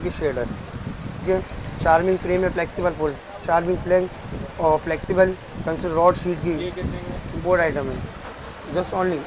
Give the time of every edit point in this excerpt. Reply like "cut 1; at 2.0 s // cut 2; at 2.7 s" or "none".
cut 1; at 1.2 s